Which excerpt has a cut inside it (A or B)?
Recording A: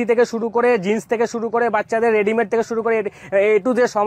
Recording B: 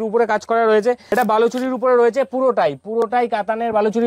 B